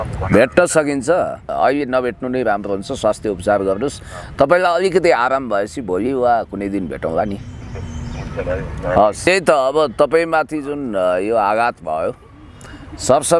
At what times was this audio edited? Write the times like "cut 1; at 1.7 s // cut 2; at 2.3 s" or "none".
cut 1; at 1.5 s // cut 2; at 9.3 s